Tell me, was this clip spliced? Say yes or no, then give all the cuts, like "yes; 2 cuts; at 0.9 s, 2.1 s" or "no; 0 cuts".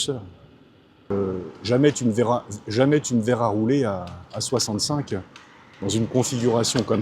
yes; 1 cut; at 1.0 s